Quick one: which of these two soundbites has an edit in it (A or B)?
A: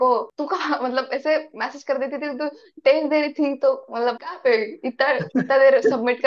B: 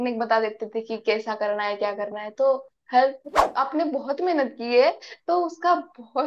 B